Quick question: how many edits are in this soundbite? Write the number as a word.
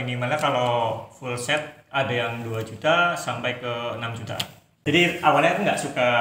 one